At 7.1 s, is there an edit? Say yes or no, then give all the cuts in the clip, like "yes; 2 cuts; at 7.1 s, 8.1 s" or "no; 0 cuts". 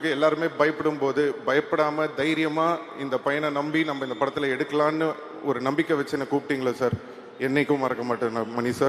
no; 0 cuts